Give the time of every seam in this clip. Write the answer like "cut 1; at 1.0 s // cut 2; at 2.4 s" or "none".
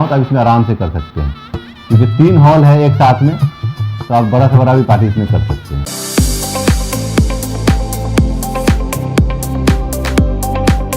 cut 1; at 5.8 s